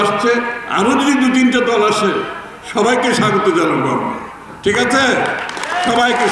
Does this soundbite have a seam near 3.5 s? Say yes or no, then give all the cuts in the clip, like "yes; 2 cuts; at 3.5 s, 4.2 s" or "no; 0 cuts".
no; 0 cuts